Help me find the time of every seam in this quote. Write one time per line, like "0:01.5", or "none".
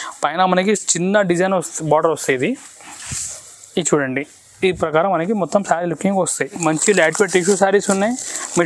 0:06.6